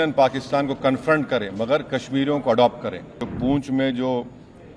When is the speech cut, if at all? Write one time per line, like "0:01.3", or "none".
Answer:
0:03.2